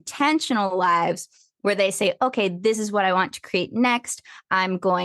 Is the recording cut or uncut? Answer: uncut